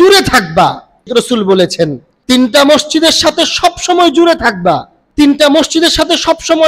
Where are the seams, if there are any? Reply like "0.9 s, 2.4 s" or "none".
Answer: 1.1 s, 2.1 s, 5.0 s